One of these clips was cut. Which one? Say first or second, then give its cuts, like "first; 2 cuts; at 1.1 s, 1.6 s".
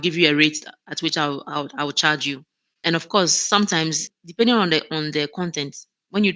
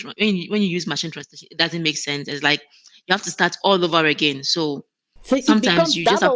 first; 2 cuts; at 2.8 s, 4.1 s